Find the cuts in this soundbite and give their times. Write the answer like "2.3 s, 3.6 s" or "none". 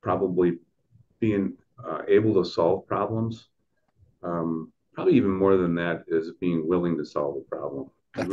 none